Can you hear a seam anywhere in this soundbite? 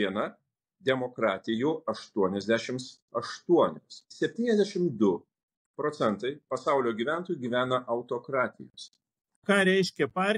yes; 2 cuts; at 4.1 s, 9.4 s

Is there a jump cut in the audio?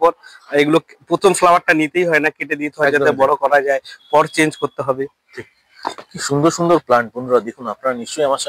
no; 0 cuts

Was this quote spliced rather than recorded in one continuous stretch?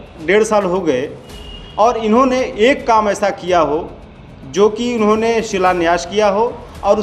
no; 0 cuts

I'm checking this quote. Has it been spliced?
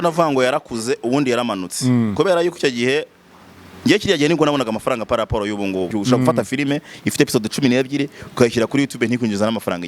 yes; 1 cut; at 5.9 s

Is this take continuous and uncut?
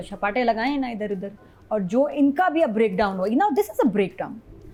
yes; 0 cuts

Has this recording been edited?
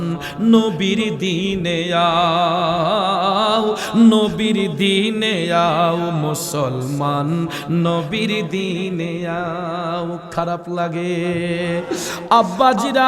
no; 0 cuts

